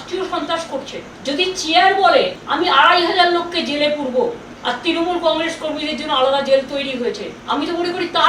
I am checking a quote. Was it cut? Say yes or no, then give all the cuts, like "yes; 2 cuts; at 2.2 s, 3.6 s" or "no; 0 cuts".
yes; 4 cuts; at 1.0 s, 2.4 s, 4.5 s, 7.3 s